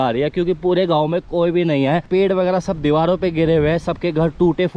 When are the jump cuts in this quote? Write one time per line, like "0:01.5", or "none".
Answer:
0:02.1

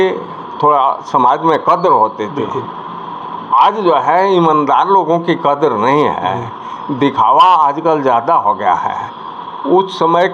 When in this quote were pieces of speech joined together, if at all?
none

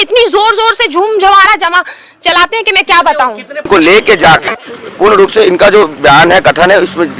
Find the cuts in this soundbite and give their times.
0:03.7

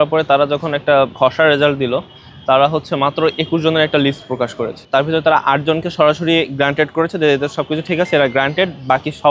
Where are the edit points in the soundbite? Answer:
0:01.1

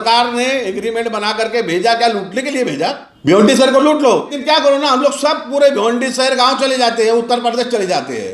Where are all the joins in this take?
0:03.1
0:04.3

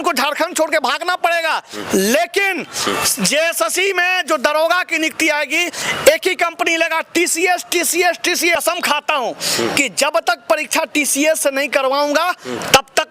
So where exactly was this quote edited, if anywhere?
0:08.6

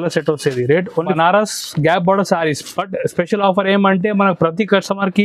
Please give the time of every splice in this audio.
0:01.1

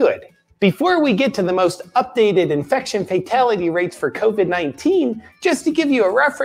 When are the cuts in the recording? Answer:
none

